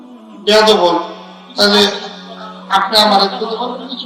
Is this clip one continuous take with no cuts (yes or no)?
yes